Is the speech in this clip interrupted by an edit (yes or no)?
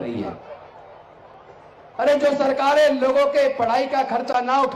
no